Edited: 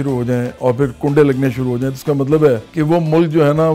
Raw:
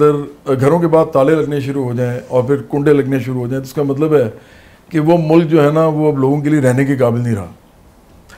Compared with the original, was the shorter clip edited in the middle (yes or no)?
yes